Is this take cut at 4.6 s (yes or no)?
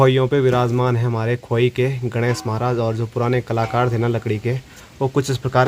no